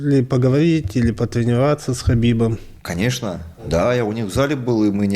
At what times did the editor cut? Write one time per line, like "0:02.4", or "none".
0:03.6

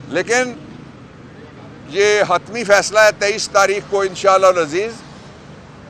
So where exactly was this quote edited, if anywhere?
none

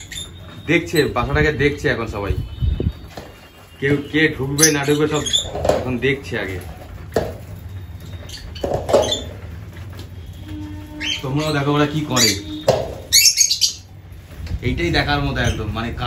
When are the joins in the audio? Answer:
none

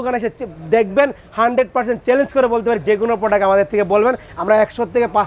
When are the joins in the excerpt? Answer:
none

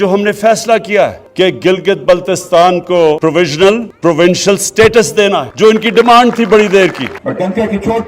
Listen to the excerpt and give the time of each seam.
0:01.2
0:03.2
0:03.9
0:05.5
0:07.1

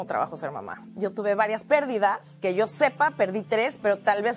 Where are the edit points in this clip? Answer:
0:02.3

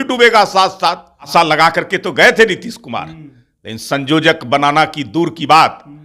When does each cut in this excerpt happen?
0:01.3

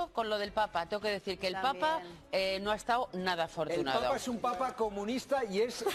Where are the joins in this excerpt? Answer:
none

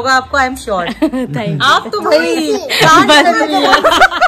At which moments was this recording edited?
none

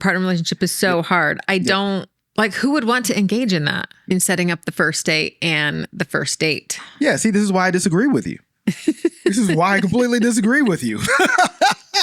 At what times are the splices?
0:04.1

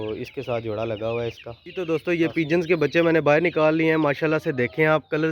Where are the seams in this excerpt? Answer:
0:01.9

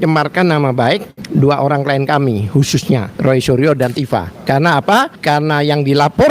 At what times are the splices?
0:01.2
0:03.1
0:04.3
0:05.1

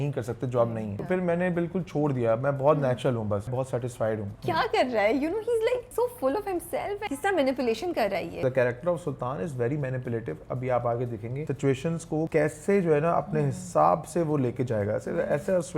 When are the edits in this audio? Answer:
0:00.9
0:03.8
0:05.9
0:07.1
0:08.4
0:11.9

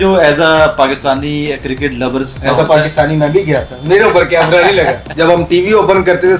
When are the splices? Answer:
0:05.0

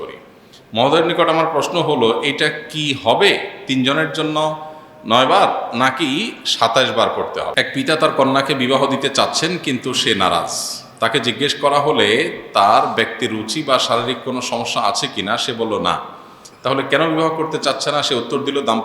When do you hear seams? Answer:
0:07.5

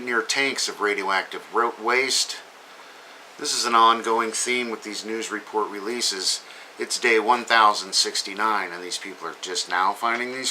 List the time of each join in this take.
0:08.0

